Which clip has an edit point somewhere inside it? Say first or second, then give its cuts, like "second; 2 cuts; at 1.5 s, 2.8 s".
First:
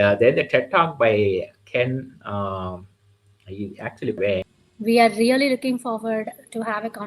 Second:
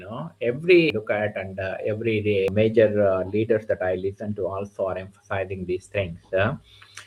first; 1 cut; at 4.6 s